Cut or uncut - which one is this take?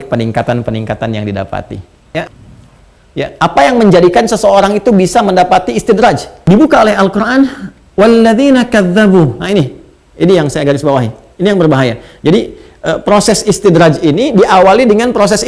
cut